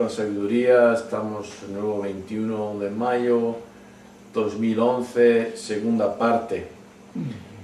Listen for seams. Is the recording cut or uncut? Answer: uncut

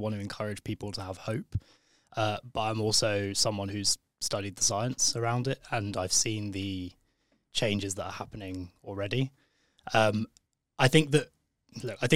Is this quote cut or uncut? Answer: uncut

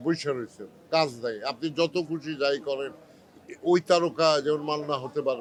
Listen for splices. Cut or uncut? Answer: uncut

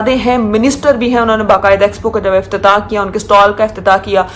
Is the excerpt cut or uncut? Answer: uncut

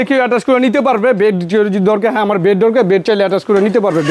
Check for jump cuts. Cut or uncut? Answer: uncut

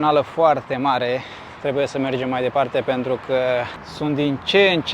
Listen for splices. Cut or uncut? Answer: cut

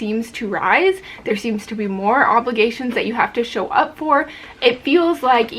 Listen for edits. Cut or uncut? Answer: uncut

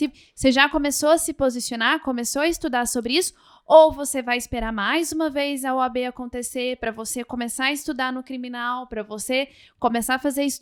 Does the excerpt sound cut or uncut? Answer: uncut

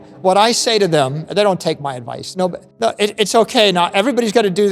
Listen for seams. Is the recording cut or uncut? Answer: cut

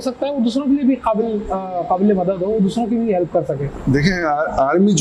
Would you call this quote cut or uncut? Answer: cut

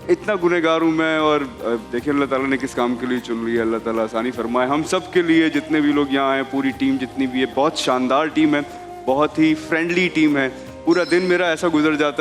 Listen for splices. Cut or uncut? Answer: uncut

